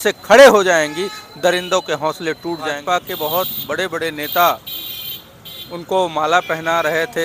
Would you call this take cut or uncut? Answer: cut